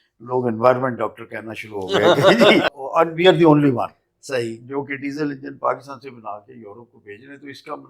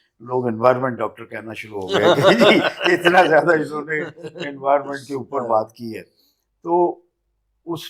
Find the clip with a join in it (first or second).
first